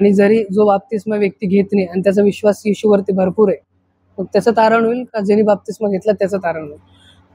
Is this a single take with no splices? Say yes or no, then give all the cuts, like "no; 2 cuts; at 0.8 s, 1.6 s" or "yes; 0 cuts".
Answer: yes; 0 cuts